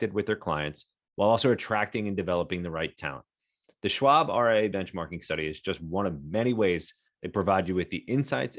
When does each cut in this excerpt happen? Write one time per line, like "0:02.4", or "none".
none